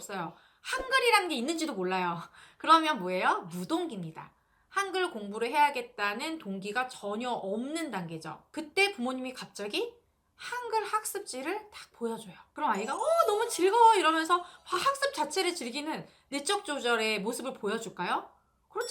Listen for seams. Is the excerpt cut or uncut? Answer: uncut